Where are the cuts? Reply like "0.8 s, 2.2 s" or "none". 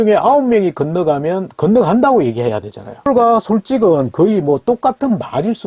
3.1 s